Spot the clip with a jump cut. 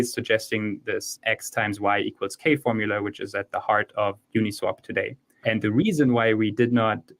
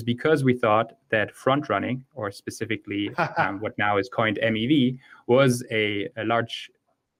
first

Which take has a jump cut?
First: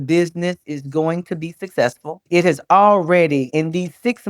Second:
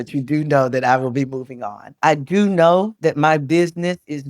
second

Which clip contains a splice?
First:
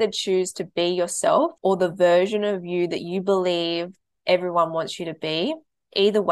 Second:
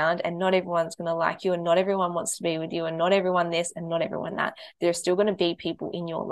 first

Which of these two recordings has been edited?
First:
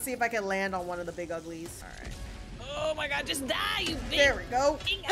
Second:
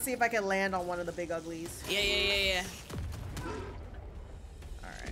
first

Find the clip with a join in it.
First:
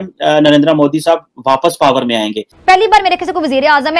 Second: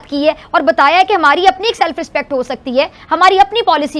first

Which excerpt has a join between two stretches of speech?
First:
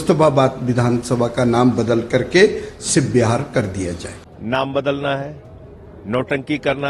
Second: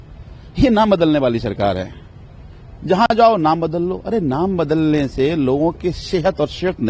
first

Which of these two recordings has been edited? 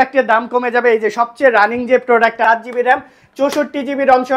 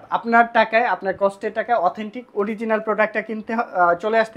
first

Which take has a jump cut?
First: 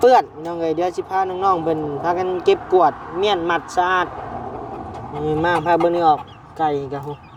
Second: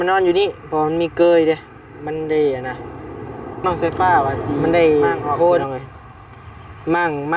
second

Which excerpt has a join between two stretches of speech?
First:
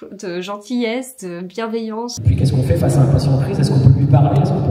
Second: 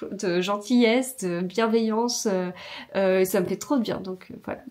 first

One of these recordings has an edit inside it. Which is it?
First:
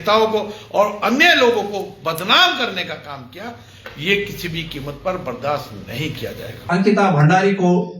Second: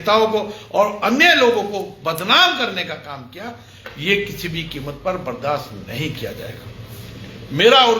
first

